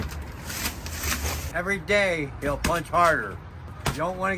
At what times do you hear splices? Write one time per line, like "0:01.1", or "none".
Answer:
none